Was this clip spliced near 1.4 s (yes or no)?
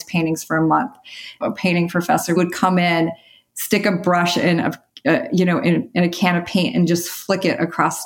yes